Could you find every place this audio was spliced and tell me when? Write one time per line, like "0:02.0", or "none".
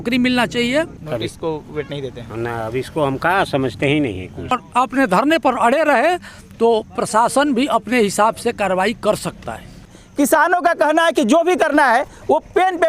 0:01.0
0:04.6
0:09.9